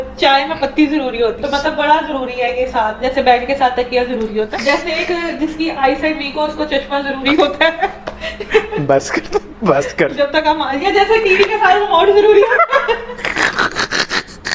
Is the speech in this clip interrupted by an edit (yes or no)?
yes